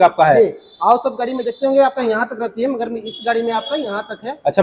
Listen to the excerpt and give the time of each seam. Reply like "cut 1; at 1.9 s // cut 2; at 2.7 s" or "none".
none